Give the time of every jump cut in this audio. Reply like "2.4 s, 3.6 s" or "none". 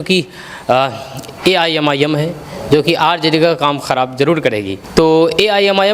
4.8 s